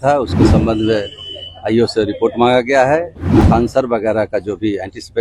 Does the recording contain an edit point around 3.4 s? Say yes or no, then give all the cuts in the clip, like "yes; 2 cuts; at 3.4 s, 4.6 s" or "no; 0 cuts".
yes; 1 cut; at 3.4 s